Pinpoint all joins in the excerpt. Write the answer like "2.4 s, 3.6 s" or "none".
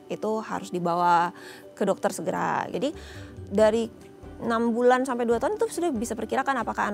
2.7 s

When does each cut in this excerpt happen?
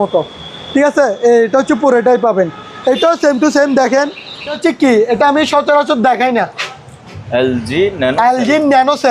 4.6 s

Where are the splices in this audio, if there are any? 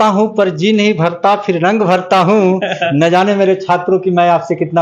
none

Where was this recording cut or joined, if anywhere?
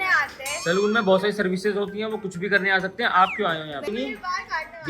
3.9 s

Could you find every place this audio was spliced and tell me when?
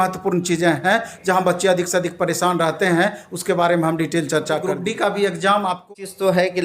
4.7 s, 5.9 s

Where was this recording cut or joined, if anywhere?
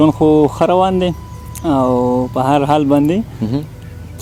none

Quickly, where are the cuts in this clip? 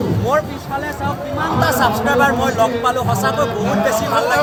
none

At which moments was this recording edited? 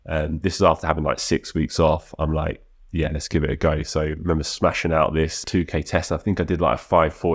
5.4 s

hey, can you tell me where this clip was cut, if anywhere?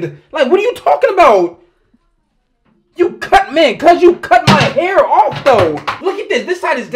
5.9 s

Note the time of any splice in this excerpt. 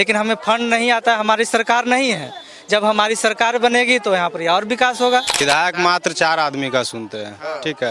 5.4 s

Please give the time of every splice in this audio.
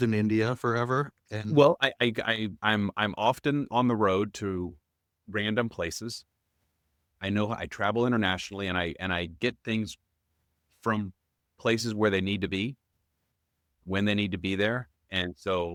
none

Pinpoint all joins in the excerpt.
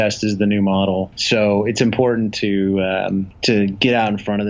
1.2 s, 3.3 s

